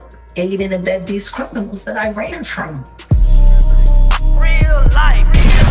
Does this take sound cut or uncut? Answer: cut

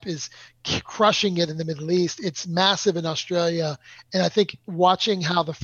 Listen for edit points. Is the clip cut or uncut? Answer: cut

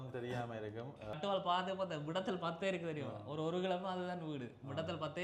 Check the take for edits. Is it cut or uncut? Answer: cut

